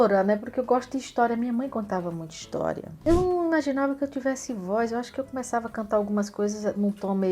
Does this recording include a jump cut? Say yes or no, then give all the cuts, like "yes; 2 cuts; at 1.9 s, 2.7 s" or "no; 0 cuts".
yes; 1 cut; at 3.0 s